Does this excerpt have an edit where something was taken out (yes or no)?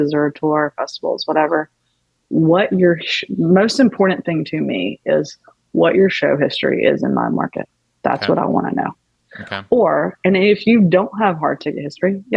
no